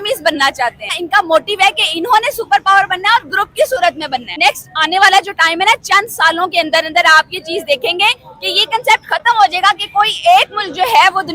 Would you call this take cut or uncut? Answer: cut